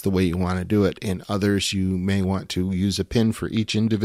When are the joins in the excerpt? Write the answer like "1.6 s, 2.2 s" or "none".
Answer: none